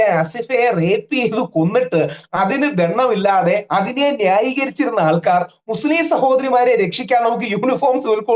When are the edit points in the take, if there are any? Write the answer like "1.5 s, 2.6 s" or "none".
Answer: none